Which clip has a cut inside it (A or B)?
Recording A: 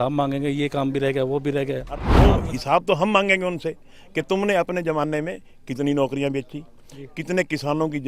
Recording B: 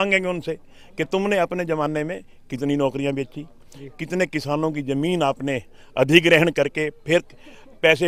A